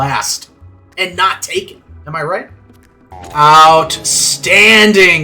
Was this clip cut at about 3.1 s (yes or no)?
yes